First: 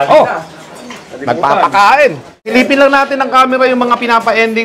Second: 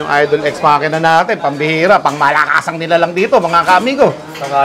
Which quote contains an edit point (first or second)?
first